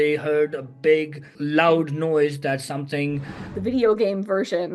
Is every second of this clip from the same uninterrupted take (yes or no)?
no